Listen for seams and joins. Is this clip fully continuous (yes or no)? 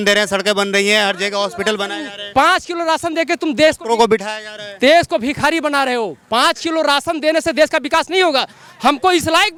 yes